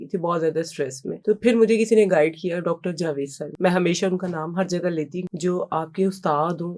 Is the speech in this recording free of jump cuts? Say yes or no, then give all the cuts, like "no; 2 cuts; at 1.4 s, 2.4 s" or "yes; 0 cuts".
no; 3 cuts; at 1.1 s, 3.4 s, 5.2 s